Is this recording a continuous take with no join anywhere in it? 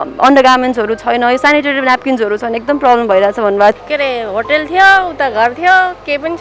no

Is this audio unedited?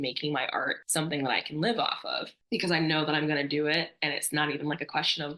yes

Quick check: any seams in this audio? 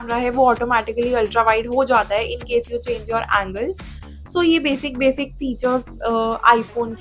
no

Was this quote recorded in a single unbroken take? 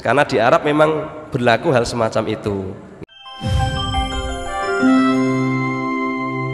no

